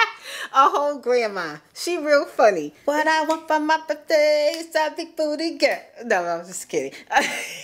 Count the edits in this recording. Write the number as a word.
one